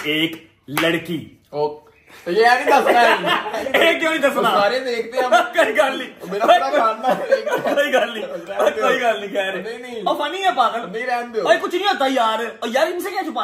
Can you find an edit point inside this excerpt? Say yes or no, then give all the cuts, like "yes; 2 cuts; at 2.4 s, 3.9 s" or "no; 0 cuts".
no; 0 cuts